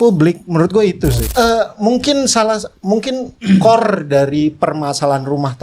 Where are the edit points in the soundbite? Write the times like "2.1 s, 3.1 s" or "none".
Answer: 1.2 s